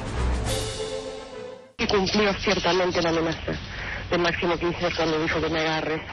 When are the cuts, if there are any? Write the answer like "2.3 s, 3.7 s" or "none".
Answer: 1.8 s